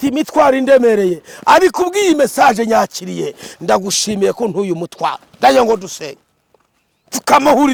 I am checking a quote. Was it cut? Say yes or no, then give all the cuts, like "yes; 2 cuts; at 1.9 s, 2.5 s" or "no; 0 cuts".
no; 0 cuts